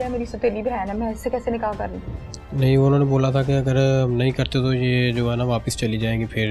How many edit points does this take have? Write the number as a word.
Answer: zero